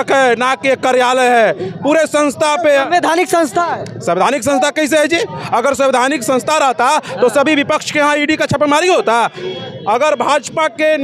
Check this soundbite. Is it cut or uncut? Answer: uncut